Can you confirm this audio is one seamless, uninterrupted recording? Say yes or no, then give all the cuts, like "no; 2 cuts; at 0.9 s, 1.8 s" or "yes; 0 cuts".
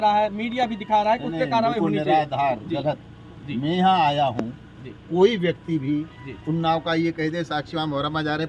yes; 0 cuts